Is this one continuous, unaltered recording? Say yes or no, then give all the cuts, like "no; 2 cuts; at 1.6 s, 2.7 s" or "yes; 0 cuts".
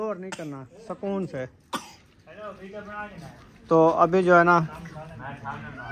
yes; 0 cuts